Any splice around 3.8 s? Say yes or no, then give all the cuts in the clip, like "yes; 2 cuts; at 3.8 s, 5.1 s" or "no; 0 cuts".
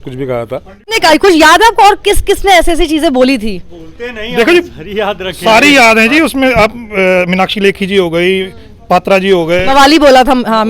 no; 1 cut; at 1.0 s